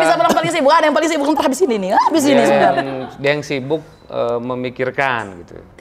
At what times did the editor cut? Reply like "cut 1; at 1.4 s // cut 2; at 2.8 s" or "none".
none